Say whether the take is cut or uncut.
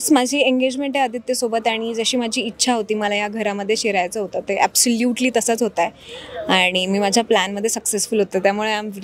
uncut